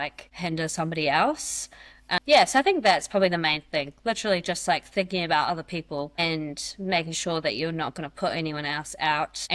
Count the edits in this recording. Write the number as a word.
zero